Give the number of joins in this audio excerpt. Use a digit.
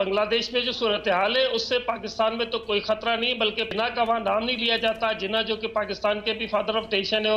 1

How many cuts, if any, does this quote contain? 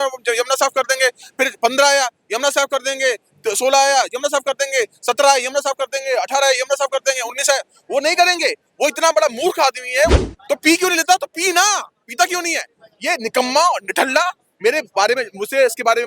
1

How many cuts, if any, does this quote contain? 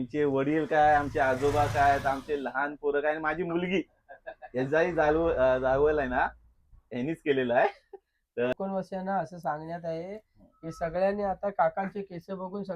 1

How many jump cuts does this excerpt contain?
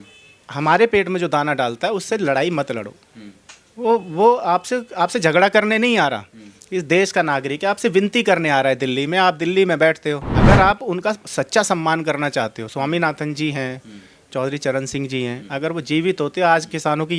1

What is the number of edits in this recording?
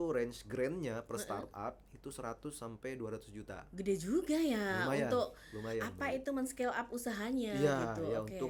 0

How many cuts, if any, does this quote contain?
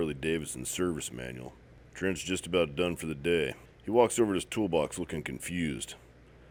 0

